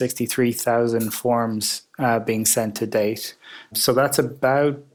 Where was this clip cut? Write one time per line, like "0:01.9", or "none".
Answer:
0:03.8